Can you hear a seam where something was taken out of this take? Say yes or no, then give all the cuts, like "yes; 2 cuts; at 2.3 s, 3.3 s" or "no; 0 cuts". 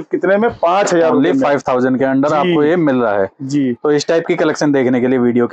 no; 0 cuts